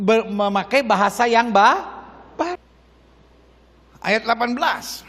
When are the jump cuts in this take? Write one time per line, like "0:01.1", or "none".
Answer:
0:02.6

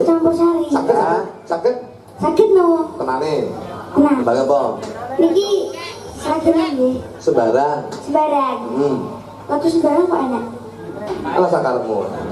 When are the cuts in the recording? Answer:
0:04.2

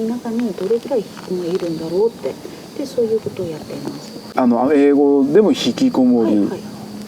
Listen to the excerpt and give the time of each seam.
0:04.3

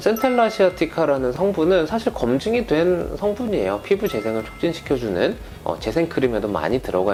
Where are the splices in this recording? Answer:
none

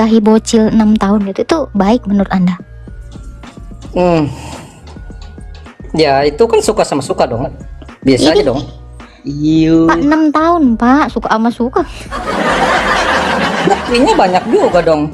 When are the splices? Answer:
none

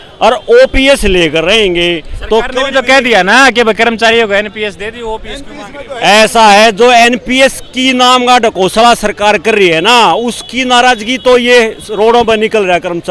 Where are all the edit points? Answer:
none

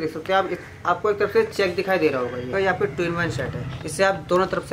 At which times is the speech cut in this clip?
0:02.5
0:03.8

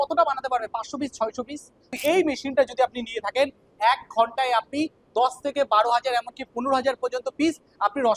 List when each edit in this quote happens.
0:01.9

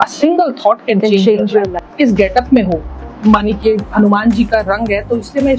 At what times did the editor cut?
0:01.7

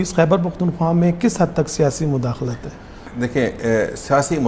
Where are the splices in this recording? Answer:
none

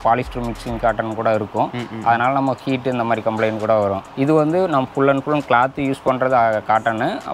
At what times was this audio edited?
none

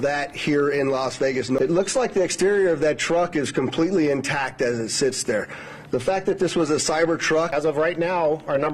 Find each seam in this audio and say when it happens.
0:01.5
0:07.5

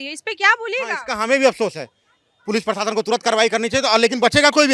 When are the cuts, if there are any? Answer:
none

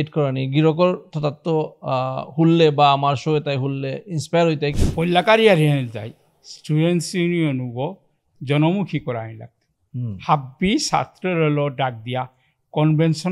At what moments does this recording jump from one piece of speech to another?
0:04.7

